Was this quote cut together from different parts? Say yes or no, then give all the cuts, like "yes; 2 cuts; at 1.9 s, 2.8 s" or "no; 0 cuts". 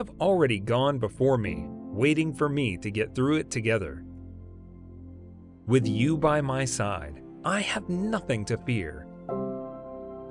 yes; 2 cuts; at 4.1 s, 5.6 s